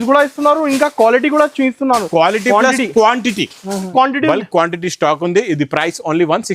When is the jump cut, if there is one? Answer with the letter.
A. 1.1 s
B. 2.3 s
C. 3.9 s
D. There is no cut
C